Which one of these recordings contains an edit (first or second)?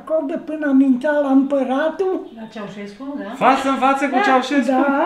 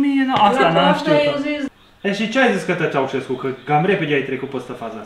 second